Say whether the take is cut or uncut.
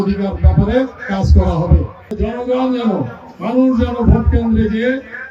cut